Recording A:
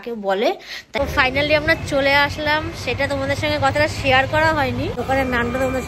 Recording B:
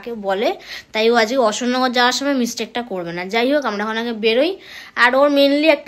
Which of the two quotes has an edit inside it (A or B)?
A